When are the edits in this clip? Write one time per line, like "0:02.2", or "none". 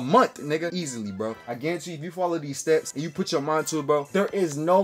0:00.9
0:03.0